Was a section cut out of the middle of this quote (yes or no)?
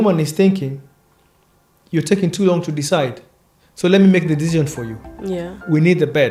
no